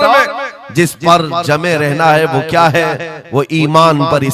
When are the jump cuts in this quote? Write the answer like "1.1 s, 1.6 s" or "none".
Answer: none